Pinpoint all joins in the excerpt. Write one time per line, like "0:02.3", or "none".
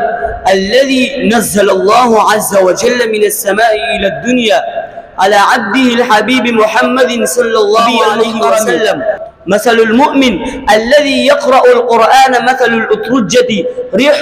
0:09.2